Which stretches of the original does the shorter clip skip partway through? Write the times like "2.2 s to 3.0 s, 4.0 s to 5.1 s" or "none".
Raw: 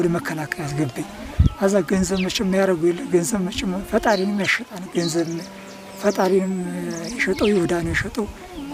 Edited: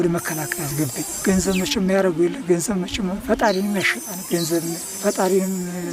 1.2 s to 1.9 s, 5.5 s to 5.9 s